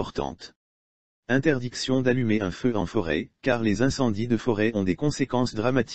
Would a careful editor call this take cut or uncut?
cut